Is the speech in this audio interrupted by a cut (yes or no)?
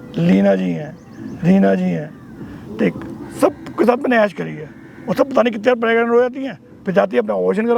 no